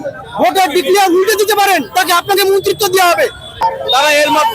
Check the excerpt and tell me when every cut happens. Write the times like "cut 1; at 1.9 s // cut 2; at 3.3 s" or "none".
cut 1; at 3.6 s